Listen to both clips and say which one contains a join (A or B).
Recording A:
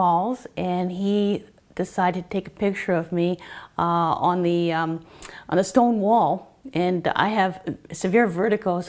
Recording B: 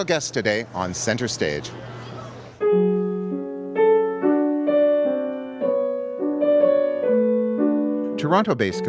B